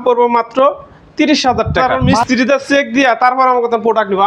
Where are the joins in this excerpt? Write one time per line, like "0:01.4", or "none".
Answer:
0:02.0